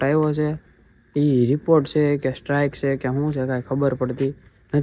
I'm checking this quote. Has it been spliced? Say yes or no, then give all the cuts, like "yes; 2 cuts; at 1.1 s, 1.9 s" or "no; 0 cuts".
no; 0 cuts